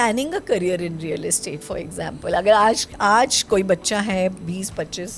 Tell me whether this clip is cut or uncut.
uncut